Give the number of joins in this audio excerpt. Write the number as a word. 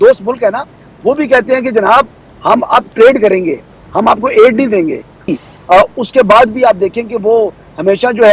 one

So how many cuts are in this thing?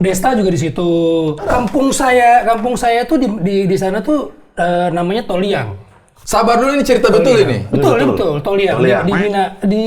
one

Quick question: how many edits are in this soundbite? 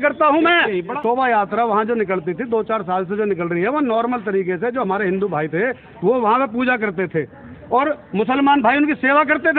one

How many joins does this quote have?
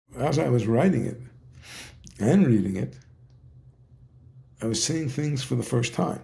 zero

